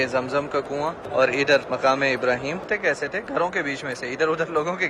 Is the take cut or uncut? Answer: cut